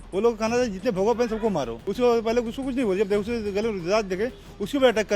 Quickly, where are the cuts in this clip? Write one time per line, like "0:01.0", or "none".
0:01.8